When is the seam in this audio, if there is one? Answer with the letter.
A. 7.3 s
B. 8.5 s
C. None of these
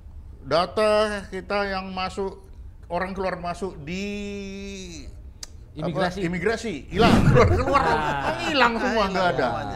A